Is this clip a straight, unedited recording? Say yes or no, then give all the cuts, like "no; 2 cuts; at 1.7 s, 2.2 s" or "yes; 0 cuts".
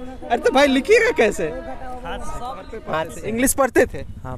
no; 1 cut; at 3.2 s